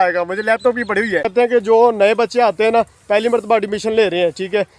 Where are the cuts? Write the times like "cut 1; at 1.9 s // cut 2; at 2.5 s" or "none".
cut 1; at 1.3 s